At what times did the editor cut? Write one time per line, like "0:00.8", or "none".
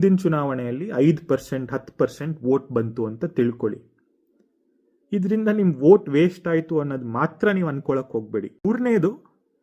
0:08.6